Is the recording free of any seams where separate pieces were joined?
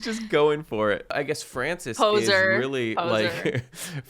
no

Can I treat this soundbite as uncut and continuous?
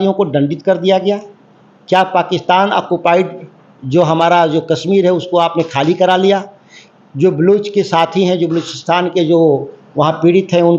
yes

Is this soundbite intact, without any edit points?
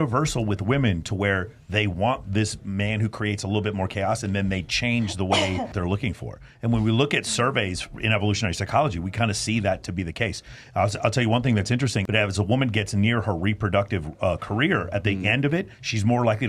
no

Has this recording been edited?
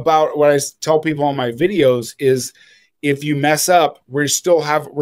no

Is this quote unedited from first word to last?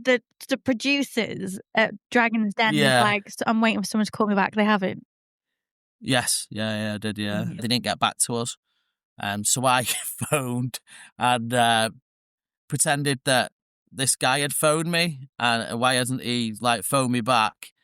no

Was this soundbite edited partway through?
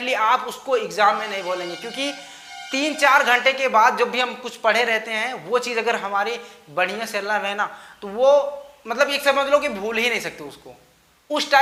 no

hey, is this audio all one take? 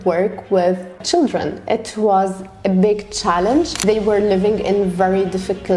no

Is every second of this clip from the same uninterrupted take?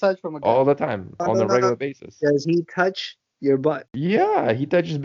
no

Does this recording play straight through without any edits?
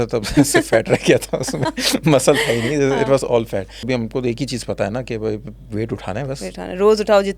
no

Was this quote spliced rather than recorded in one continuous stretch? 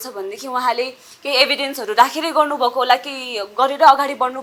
no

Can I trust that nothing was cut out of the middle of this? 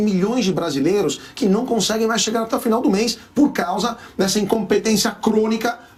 yes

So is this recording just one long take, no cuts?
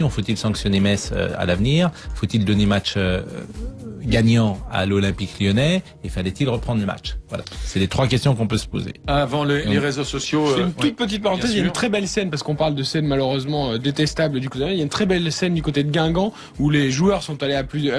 yes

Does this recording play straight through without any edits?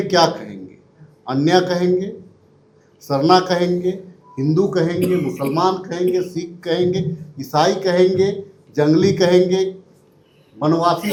yes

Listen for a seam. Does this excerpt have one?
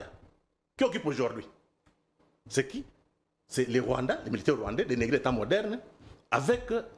no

